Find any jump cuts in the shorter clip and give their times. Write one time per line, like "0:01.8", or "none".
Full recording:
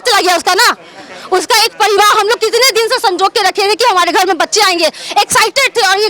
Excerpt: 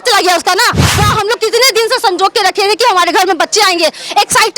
0:01.1